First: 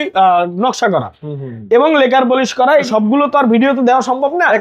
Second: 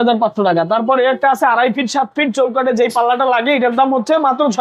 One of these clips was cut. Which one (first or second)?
first